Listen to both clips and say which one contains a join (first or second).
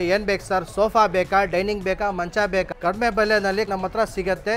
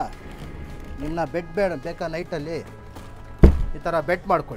first